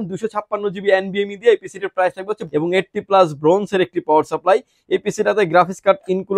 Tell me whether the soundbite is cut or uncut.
cut